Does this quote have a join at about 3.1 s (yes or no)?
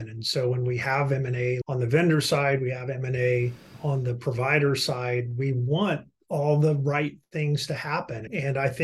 no